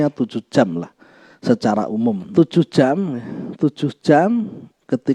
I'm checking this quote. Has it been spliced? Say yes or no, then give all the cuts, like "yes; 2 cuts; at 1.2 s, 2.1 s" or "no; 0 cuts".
yes; 1 cut; at 2.2 s